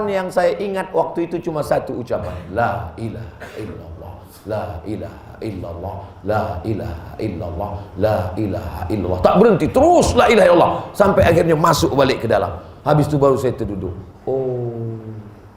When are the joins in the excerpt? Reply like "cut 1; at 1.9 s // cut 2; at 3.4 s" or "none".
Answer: none

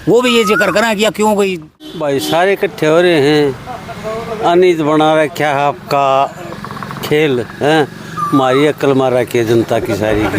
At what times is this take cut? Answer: cut 1; at 1.9 s

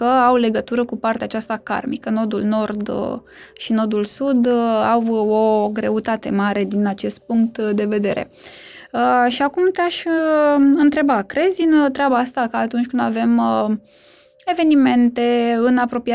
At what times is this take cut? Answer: none

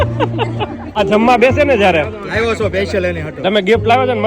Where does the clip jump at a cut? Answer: cut 1; at 1.0 s

